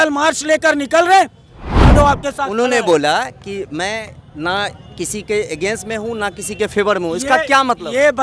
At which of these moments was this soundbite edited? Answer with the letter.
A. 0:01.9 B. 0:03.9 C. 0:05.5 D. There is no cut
A